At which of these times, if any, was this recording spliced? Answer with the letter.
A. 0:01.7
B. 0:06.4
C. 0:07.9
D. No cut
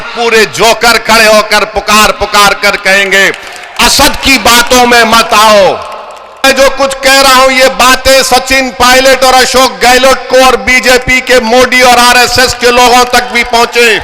B